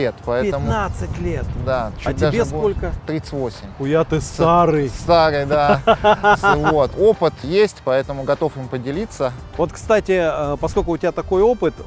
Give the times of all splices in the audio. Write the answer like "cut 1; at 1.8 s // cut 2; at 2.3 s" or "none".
none